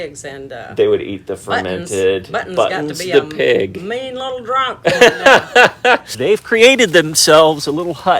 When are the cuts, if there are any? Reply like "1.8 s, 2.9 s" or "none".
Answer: 6.0 s